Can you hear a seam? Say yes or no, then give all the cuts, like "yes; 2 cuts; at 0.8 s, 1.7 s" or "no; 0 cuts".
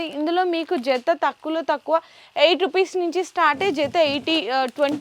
no; 0 cuts